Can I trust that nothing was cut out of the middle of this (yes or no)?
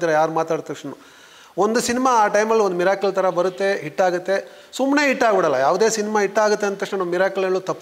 yes